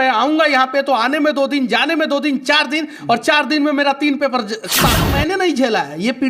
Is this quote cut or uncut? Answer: cut